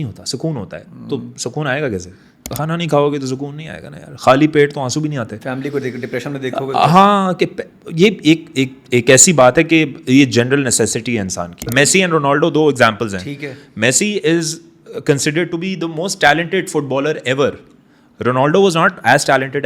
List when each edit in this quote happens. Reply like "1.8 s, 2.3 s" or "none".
2.4 s, 11.7 s